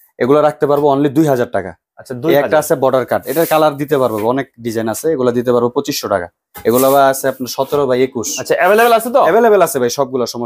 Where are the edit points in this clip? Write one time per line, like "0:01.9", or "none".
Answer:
none